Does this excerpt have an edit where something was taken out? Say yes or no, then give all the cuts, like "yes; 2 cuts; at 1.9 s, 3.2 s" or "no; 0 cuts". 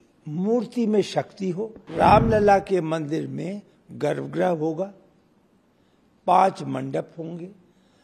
yes; 1 cut; at 1.8 s